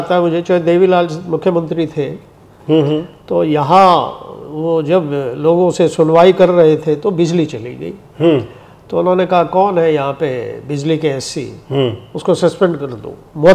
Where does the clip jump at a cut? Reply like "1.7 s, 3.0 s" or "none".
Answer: none